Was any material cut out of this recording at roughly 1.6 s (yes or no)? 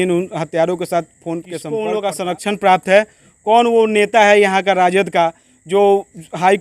yes